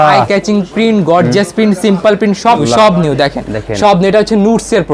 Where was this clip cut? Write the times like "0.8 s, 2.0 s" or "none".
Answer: 2.6 s